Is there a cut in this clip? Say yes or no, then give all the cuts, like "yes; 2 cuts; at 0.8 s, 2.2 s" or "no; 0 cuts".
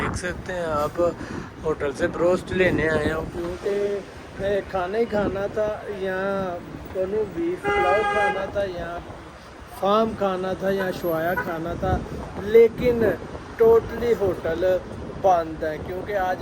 no; 0 cuts